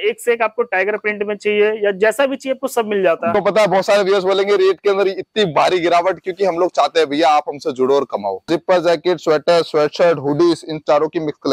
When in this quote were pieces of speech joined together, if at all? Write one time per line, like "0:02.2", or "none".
0:03.3
0:08.4